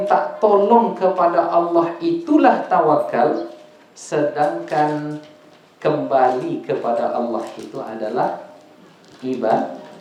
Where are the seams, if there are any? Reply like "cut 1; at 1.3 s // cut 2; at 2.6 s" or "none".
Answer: none